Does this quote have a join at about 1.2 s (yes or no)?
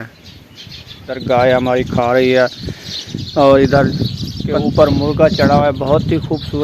yes